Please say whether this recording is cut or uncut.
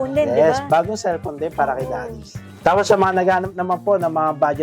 cut